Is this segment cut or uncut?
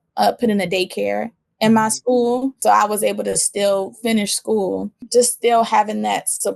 cut